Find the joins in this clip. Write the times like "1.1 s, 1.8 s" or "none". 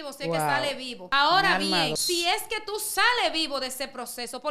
0.9 s, 2.0 s